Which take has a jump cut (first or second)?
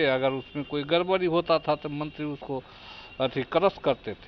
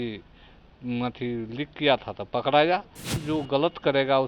second